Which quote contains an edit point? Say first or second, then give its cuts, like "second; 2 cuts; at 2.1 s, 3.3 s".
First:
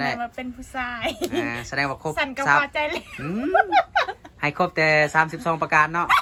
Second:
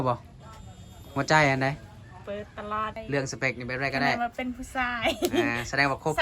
second; 1 cut; at 3.0 s